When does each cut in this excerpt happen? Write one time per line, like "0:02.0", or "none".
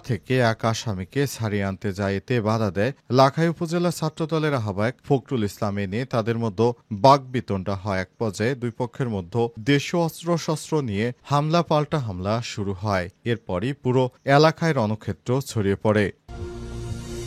0:16.2

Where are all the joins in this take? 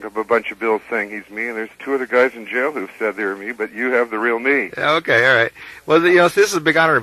0:02.5

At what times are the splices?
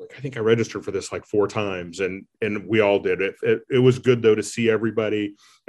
none

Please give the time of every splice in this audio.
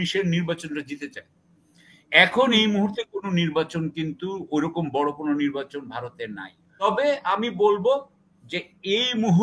0:06.8

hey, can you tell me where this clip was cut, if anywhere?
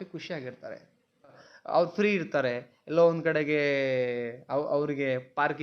0:01.5

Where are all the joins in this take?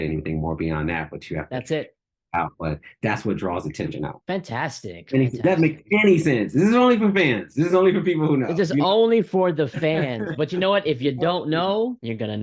0:04.2

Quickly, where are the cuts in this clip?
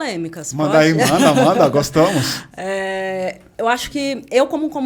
none

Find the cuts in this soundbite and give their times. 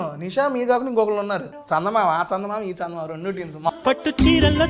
0:01.5
0:03.7

